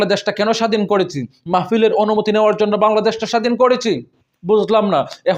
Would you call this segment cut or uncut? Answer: uncut